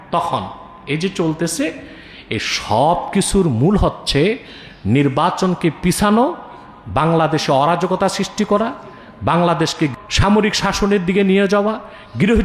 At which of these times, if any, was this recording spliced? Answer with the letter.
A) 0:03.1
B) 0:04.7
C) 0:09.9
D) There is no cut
C